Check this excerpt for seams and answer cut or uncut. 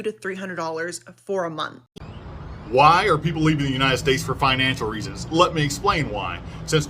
cut